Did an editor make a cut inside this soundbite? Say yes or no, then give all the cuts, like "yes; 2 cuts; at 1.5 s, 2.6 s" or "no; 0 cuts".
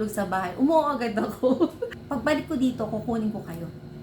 yes; 1 cut; at 1.9 s